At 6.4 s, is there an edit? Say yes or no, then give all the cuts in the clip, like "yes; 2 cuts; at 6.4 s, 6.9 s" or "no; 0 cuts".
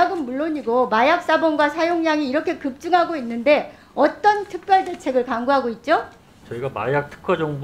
yes; 1 cut; at 6.4 s